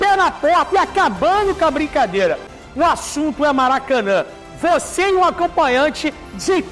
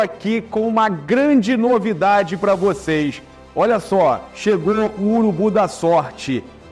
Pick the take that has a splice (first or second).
first